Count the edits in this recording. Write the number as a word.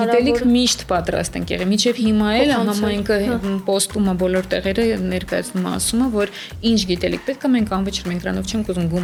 zero